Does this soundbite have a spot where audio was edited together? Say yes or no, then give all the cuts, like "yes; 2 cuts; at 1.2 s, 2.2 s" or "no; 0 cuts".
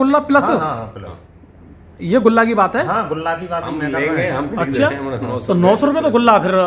no; 0 cuts